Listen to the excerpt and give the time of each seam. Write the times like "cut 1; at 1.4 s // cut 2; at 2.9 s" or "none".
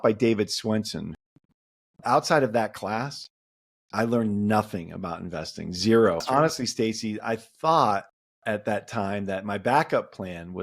cut 1; at 1.1 s // cut 2; at 6.2 s